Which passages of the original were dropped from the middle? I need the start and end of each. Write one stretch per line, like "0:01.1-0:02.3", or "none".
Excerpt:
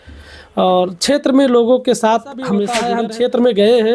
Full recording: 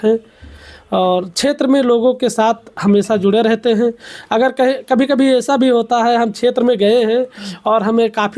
0:03.1-0:06.0